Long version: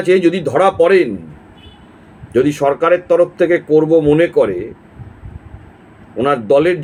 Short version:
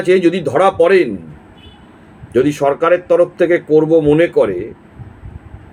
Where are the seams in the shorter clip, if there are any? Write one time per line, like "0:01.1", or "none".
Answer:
none